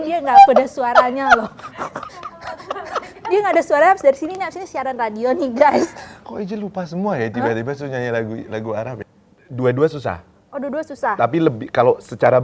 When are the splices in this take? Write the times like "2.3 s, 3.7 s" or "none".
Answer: 9.1 s

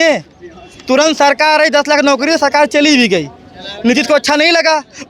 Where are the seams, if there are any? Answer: none

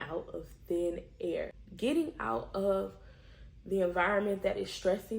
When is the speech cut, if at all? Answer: 1.6 s

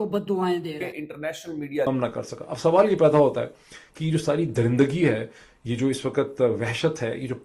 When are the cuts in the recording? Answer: 1.9 s

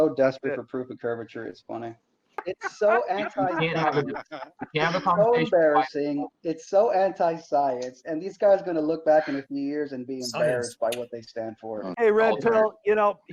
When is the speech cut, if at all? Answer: 2.5 s, 11.8 s

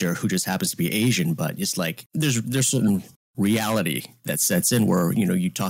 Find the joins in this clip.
2.0 s

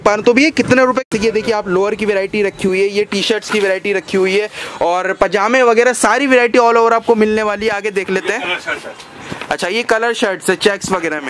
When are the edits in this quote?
1.1 s

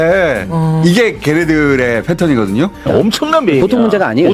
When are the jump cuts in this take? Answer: 2.8 s

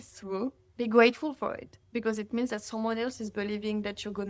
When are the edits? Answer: none

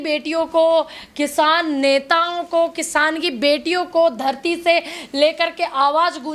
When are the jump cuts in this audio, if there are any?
none

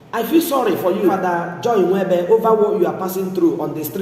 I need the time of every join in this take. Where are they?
1.1 s

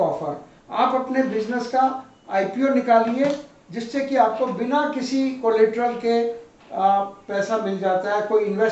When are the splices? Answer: none

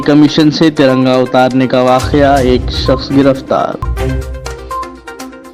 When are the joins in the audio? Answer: none

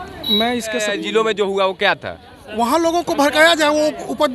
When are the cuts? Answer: 0.9 s

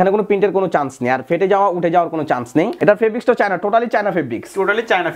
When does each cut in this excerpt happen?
2.7 s

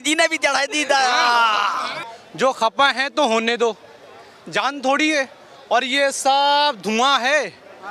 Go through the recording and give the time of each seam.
1.9 s

